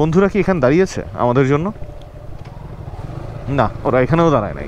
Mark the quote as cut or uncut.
uncut